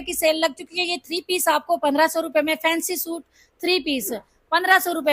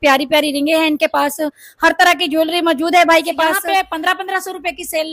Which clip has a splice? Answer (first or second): second